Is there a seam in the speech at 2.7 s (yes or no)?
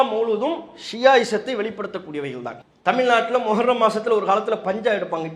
yes